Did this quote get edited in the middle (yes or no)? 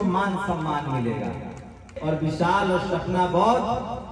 yes